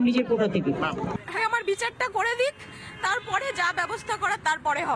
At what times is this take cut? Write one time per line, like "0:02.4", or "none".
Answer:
0:01.4